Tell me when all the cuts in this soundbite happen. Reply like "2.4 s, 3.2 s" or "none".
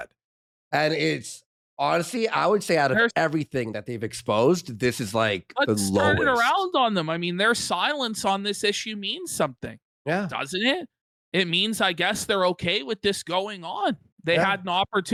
none